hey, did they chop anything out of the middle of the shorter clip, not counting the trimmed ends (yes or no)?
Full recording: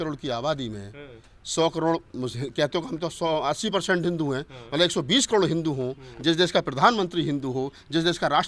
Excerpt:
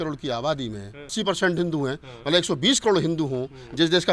yes